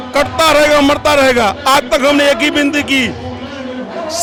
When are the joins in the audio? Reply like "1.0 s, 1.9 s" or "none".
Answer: none